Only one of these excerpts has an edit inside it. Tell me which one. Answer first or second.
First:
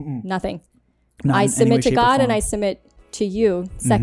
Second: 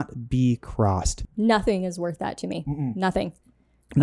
second